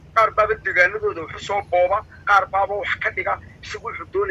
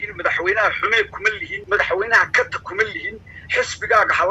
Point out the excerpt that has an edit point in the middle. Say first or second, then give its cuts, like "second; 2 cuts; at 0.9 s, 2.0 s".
second; 1 cut; at 1.5 s